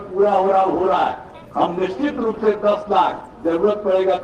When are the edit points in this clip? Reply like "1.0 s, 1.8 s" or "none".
1.3 s

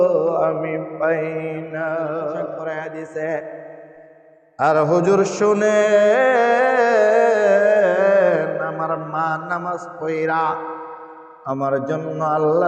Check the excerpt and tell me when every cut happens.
2.6 s

